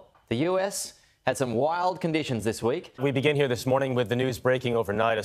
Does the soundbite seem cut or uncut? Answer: cut